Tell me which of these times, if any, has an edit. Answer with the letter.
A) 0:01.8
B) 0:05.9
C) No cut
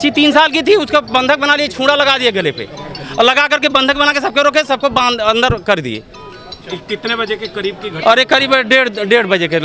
C